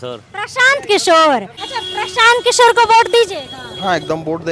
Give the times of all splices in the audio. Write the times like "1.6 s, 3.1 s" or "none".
1.5 s